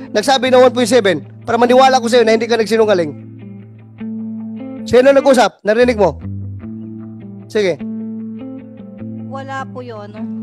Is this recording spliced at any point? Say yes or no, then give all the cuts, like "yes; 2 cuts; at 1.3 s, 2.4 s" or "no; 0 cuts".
no; 0 cuts